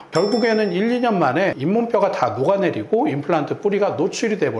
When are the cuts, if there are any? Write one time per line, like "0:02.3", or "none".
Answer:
0:01.6

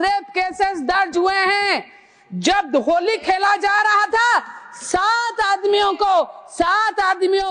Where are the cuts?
none

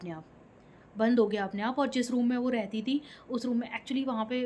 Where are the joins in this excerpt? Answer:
none

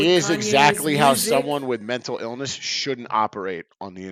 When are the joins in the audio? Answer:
none

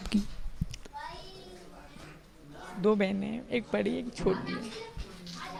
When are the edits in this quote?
none

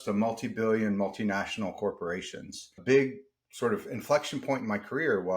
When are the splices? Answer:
0:02.7

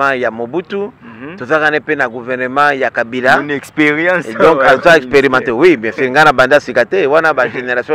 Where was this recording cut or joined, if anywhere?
none

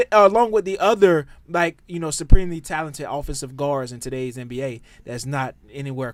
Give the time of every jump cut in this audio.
none

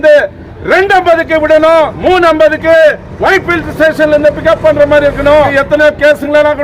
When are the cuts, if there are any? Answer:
0:01.9
0:05.5

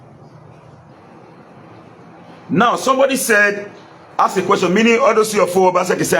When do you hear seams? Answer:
0:00.9

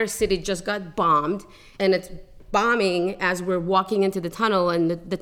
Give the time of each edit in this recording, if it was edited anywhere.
0:01.7

